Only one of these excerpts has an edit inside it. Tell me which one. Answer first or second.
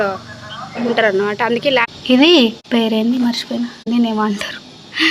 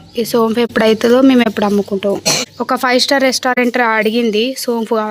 first